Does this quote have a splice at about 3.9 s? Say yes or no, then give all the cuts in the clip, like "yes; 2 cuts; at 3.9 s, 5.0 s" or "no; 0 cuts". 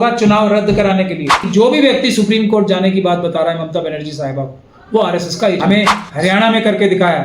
no; 2 cuts; at 1.4 s, 5.6 s